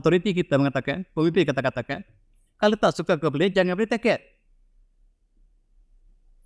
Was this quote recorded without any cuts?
yes; 0 cuts

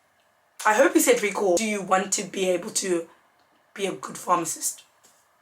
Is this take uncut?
no; 1 cut; at 1.6 s

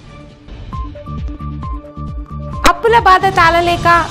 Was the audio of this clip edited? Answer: no; 0 cuts

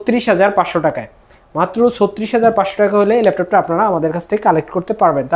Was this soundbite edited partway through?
no; 0 cuts

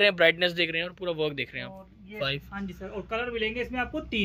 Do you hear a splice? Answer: yes; 1 cut; at 2.2 s

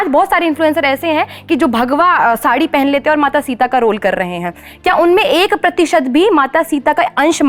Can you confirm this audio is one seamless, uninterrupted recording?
yes; 0 cuts

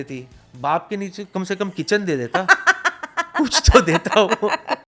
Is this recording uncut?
yes; 0 cuts

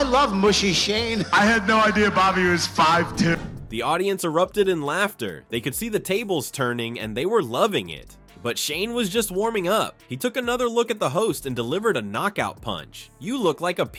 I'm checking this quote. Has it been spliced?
no; 0 cuts

